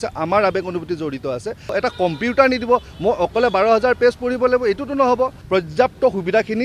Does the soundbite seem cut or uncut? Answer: cut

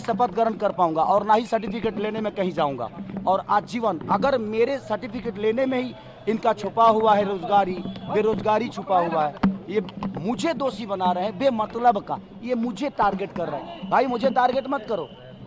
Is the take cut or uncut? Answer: uncut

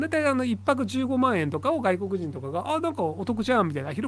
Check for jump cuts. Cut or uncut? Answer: uncut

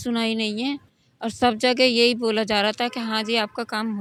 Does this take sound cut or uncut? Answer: uncut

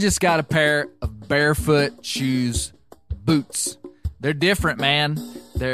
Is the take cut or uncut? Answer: uncut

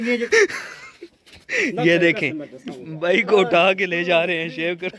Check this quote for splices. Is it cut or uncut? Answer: uncut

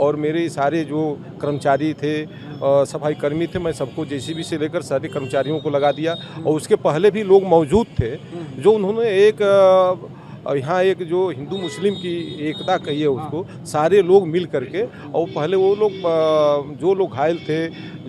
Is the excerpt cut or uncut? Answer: uncut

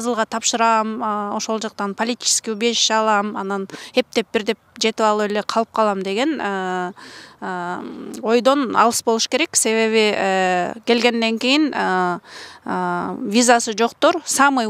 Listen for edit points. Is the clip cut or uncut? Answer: uncut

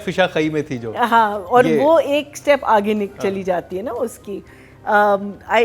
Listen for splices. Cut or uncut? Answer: uncut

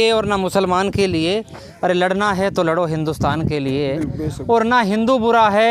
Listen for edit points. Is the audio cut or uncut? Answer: uncut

